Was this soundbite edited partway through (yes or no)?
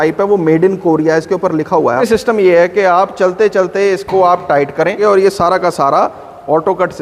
yes